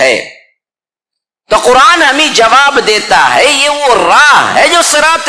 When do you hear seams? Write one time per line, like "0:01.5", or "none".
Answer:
none